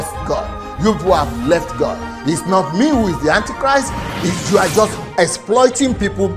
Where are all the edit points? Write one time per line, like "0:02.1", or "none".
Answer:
0:04.0